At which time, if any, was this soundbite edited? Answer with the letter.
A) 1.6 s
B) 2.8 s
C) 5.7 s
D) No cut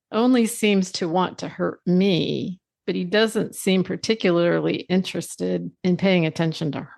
C